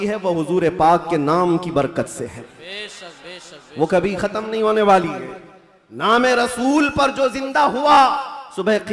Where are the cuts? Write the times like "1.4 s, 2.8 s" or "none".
none

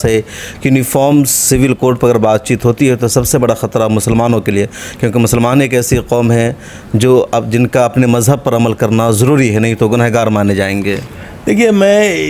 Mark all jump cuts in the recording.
none

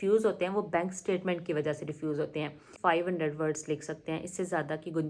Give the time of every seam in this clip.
2.7 s

